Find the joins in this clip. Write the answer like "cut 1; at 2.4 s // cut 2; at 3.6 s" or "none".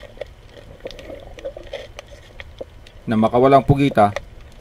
cut 1; at 2.8 s